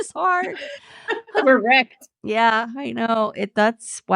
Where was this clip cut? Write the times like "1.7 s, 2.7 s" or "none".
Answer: 1.4 s